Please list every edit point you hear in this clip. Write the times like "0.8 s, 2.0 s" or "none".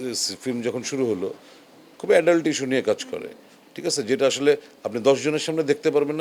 none